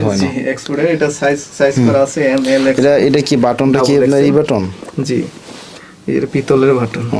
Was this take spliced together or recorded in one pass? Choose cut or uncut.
uncut